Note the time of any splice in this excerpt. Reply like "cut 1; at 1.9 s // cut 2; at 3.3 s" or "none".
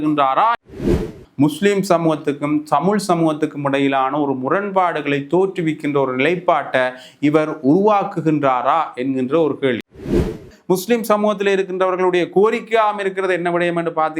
cut 1; at 1.0 s // cut 2; at 10.1 s